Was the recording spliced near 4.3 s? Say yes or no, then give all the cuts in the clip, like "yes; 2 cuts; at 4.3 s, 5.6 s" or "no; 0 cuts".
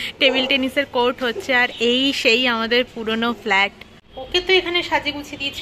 yes; 1 cut; at 4.3 s